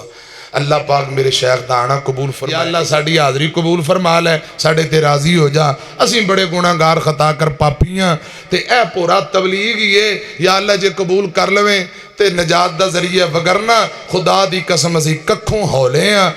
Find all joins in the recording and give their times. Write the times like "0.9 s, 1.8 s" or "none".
2.4 s